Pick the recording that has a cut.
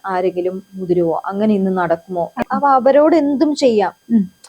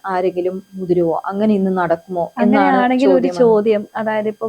first; 1 cut; at 2.4 s

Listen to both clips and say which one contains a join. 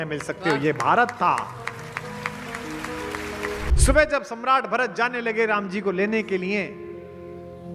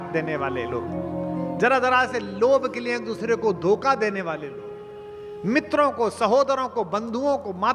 first; 1 cut; at 3.7 s

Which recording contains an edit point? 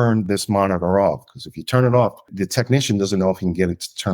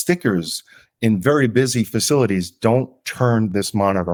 first; 1 cut; at 2.3 s

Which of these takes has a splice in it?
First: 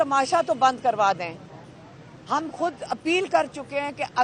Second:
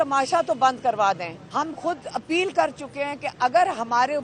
second; 1 cut; at 1.4 s

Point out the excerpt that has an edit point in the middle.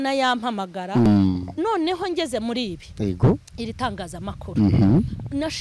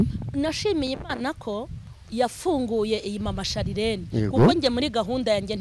first; 1 cut; at 1.1 s

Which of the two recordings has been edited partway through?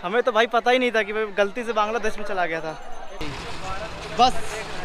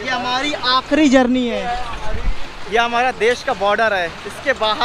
first; 1 cut; at 3.3 s

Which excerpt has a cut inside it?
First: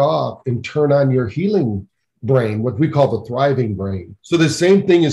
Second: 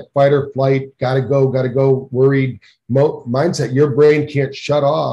first; 1 cut; at 4.1 s

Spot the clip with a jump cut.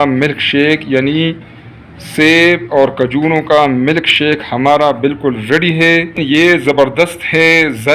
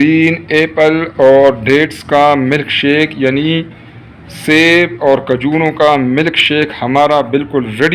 first; 1 cut; at 6.6 s

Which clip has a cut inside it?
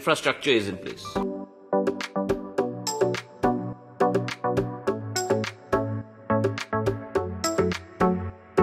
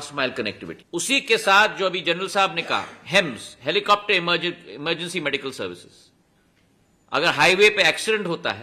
first; 1 cut; at 1.0 s

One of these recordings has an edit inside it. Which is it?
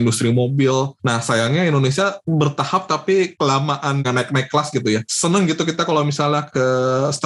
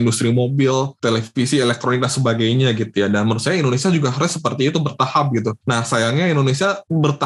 first; 3 cuts; at 0.9 s, 4.0 s, 5.1 s

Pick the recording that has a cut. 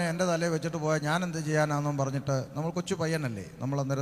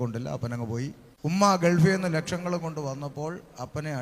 second; 1 cut; at 1.0 s

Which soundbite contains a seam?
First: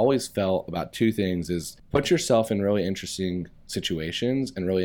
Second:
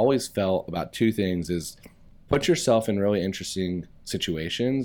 first; 1 cut; at 1.7 s

